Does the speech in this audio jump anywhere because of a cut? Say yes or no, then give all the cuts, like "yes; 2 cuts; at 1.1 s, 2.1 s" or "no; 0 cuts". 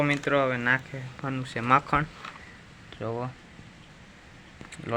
no; 0 cuts